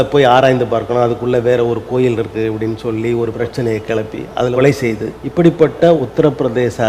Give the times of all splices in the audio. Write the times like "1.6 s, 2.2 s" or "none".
3.3 s, 4.5 s, 5.2 s, 6.0 s